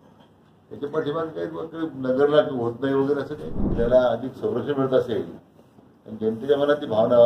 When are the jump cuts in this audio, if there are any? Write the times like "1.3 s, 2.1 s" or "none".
3.7 s